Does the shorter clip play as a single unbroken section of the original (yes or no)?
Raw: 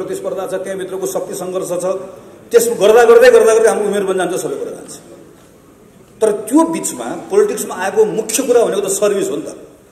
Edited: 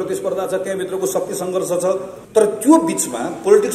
no